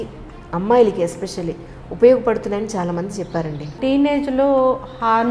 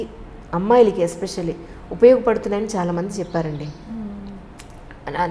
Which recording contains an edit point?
first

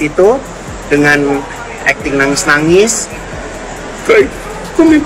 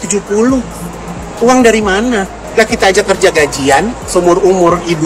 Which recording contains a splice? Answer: second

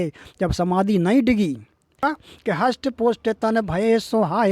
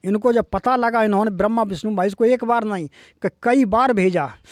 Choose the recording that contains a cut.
first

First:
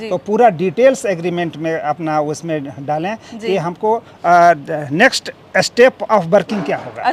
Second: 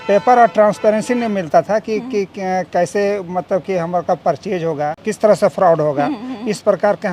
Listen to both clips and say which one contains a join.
second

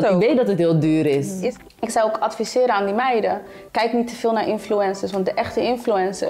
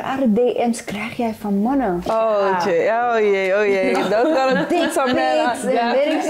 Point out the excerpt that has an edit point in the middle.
first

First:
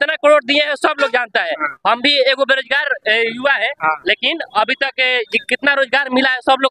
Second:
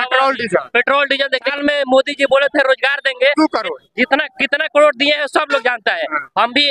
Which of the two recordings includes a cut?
second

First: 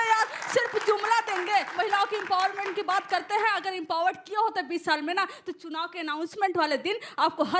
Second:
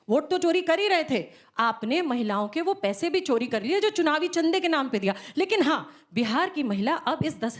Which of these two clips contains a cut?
first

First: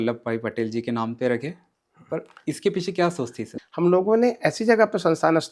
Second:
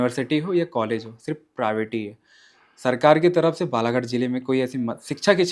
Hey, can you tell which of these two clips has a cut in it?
first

